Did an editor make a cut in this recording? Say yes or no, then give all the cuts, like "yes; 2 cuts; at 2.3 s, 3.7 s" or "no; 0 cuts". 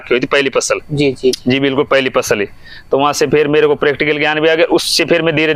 no; 0 cuts